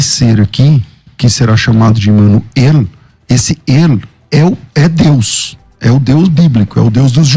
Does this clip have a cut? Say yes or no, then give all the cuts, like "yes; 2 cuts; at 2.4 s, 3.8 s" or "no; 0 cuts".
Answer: no; 0 cuts